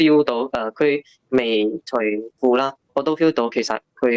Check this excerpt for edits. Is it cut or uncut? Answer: cut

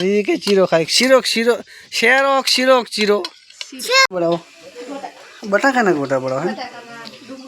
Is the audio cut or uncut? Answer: cut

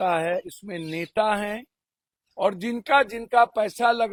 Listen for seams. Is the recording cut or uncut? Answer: uncut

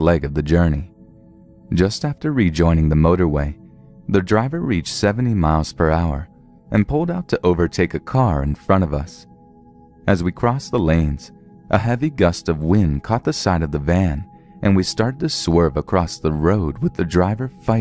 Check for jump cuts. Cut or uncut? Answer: uncut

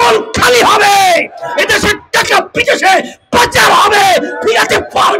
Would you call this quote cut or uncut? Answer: uncut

